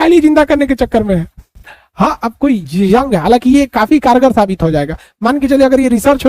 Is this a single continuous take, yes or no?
yes